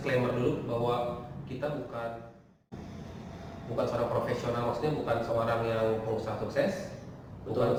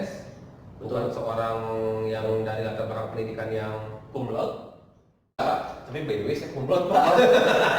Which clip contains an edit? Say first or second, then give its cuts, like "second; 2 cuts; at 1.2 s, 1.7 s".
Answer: second; 1 cut; at 5.4 s